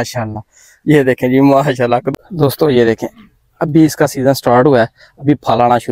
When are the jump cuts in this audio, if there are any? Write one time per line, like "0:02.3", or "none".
0:02.1

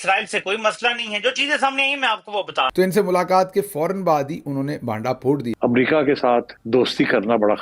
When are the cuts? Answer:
0:02.7
0:05.5

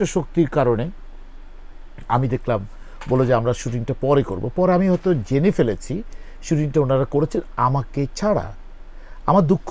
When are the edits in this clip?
none

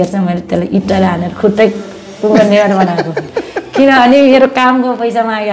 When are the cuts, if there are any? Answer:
none

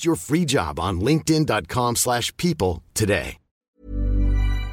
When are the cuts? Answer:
0:03.7

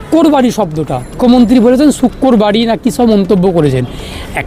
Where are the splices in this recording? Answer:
0:01.1

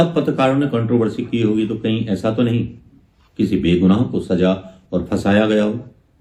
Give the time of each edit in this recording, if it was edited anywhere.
none

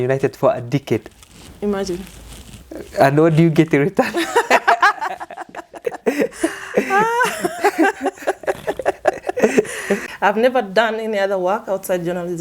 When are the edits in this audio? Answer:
0:10.1

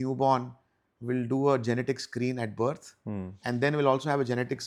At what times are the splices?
none

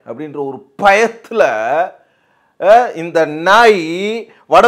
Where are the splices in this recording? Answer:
none

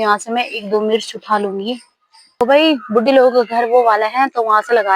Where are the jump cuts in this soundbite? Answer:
0:02.3

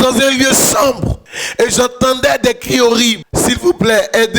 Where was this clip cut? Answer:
0:03.2

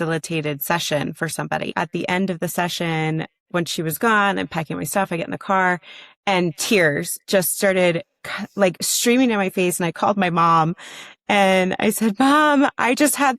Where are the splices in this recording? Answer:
0:01.7

